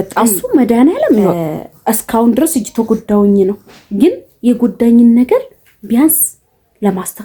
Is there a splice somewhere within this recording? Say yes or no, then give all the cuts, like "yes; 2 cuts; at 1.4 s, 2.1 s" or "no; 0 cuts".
no; 0 cuts